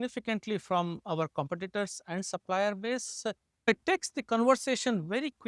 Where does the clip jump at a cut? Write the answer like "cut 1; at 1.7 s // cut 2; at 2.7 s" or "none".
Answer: cut 1; at 3.5 s